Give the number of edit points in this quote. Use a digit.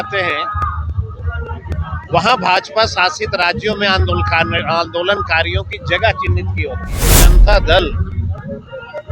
1